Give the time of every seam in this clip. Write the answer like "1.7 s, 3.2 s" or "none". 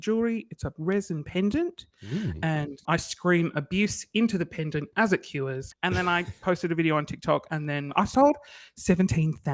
2.8 s, 5.6 s, 7.9 s